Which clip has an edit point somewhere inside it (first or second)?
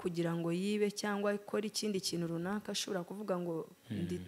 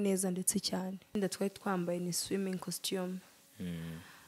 second